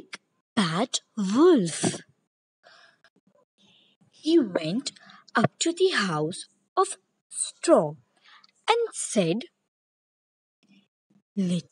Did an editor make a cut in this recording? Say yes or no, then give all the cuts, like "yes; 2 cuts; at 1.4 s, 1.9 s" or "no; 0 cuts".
yes; 1 cut; at 10.4 s